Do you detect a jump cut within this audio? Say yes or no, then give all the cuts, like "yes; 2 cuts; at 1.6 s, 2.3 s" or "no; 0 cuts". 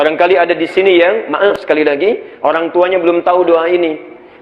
yes; 1 cut; at 1.5 s